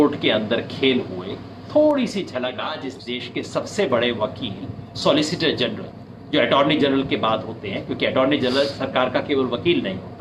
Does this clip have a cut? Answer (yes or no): yes